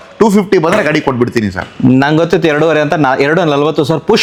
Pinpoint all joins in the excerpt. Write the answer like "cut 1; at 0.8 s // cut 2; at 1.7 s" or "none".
none